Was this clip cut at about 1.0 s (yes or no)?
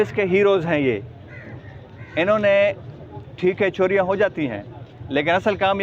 no